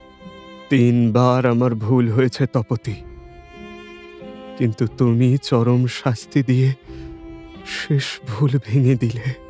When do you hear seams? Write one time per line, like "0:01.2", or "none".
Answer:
none